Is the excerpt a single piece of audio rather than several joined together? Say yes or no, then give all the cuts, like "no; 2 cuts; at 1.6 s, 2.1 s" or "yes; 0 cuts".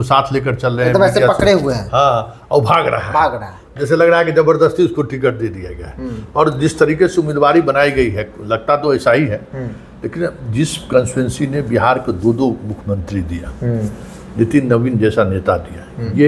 yes; 0 cuts